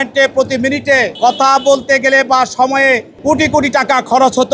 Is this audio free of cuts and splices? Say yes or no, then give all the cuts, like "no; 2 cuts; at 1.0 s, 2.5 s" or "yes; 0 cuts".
no; 2 cuts; at 1.1 s, 3.1 s